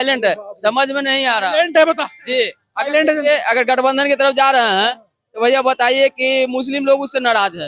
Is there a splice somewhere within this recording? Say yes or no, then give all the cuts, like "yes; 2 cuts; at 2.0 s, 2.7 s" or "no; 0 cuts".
no; 0 cuts